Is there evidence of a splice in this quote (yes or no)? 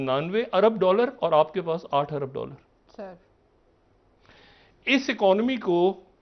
no